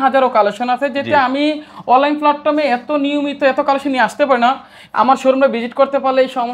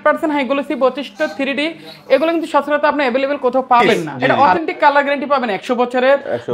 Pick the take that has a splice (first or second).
second